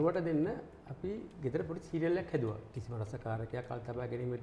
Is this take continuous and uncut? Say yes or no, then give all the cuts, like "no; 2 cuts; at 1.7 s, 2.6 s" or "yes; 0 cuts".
no; 1 cut; at 2.7 s